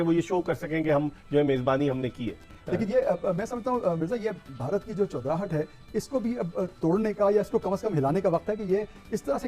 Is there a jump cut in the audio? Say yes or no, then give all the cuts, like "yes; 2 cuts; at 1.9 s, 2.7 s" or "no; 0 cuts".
yes; 1 cut; at 2.5 s